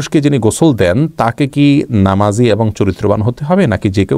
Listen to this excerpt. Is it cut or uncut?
uncut